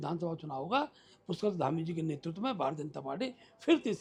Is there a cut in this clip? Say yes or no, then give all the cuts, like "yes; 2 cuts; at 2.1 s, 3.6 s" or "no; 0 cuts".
no; 0 cuts